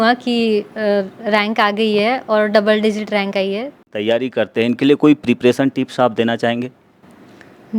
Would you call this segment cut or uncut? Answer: cut